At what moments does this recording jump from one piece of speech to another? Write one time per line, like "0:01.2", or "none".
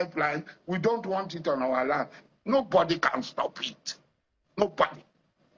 0:02.1